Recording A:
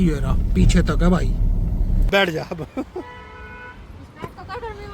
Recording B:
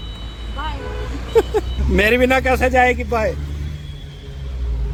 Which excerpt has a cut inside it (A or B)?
A